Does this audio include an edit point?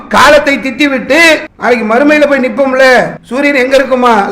yes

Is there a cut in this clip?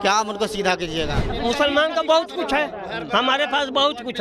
yes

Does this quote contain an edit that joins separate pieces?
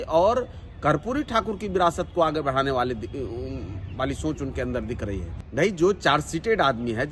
yes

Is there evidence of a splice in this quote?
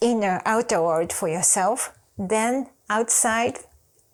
no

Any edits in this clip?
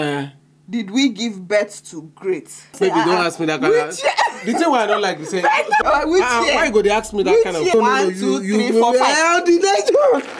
yes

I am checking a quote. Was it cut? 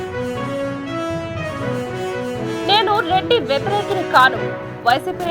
yes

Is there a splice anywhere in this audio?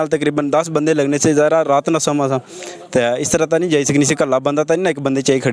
no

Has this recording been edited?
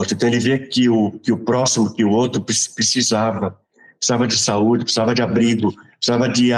no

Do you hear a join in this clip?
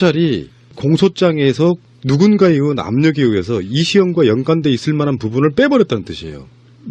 yes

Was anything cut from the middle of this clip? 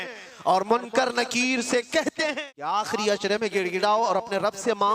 yes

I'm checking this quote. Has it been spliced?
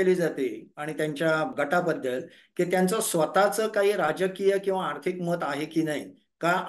yes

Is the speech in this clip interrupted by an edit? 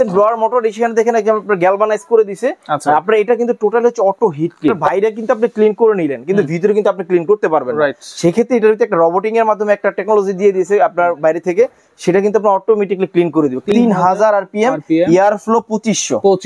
yes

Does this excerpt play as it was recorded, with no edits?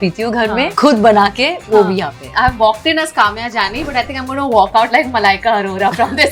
yes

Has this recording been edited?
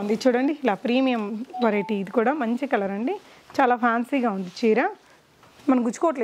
no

